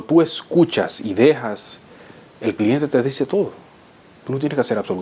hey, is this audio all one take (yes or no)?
yes